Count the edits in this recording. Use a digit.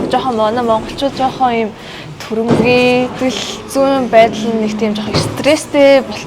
1